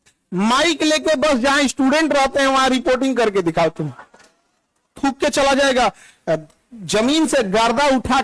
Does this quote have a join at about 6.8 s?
no; 1 cut; at 5.0 s

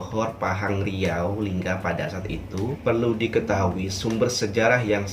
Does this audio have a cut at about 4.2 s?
no; 1 cut; at 2.8 s

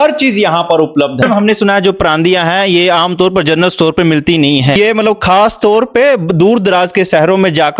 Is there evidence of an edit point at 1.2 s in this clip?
yes; 2 cuts; at 1.2 s, 4.7 s

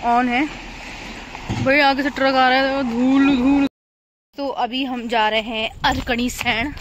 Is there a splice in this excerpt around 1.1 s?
no; 1 cut; at 3.7 s

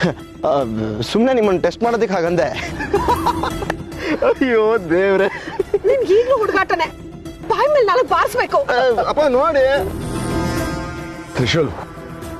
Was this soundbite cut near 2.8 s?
yes; 1 cut; at 2.8 s

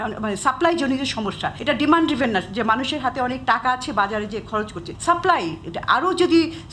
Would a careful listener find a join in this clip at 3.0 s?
no; 2 cuts; at 1.5 s, 4.8 s

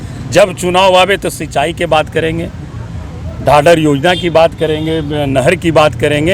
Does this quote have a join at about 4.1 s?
no; 0 cuts

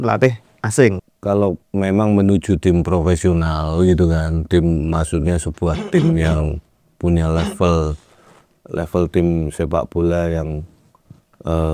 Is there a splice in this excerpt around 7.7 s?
no; 1 cut; at 1.1 s

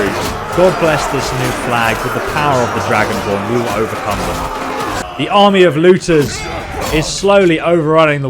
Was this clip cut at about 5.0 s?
yes; 1 cut; at 5.0 s

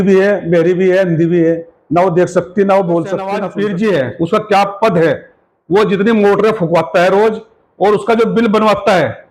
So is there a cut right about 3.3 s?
yes; 1 cut; at 3.3 s

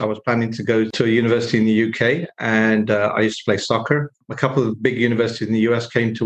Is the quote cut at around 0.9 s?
yes; 2 cuts; at 0.9 s, 4.2 s

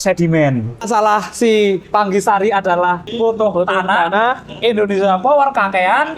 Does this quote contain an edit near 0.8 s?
yes; 3 cuts; at 0.8 s, 1.8 s, 3.1 s

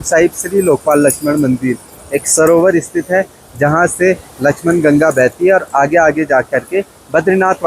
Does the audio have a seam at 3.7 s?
no; 0 cuts

